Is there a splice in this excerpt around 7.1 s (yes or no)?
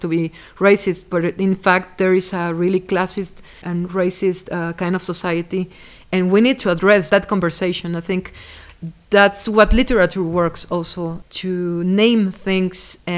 yes